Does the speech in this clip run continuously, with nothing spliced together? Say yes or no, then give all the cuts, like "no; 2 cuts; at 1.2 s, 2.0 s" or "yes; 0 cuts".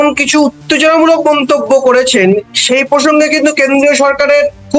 yes; 0 cuts